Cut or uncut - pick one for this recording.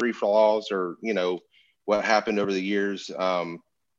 uncut